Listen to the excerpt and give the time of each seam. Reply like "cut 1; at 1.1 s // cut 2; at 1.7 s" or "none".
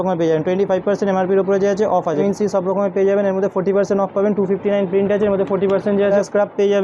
cut 1; at 2.2 s // cut 2; at 6.1 s